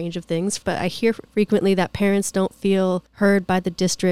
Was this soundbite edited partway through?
yes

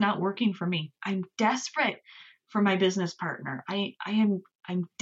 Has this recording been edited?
yes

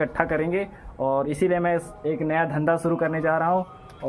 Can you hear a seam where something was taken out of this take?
no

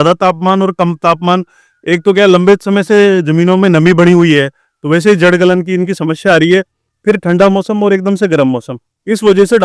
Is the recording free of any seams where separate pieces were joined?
yes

